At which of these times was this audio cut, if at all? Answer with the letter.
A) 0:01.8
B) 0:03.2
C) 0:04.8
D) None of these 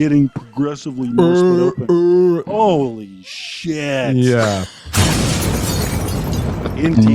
C